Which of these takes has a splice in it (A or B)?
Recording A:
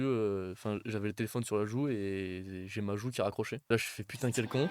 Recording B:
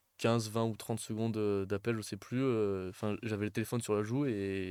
A